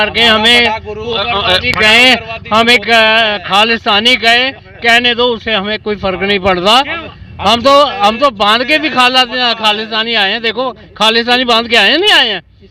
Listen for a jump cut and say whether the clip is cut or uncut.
uncut